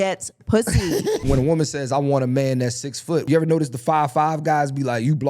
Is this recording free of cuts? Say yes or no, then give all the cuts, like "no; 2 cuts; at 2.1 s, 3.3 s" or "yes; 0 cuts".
no; 2 cuts; at 1.2 s, 3.3 s